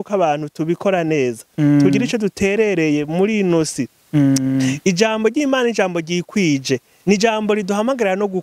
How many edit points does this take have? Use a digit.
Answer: 0